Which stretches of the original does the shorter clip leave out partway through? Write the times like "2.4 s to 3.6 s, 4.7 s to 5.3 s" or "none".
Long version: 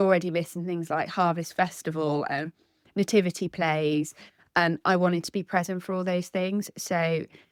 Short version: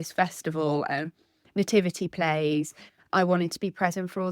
4.5 s to 4.8 s